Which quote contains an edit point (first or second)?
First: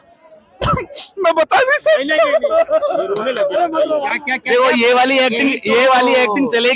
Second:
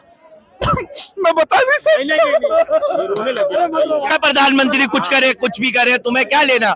second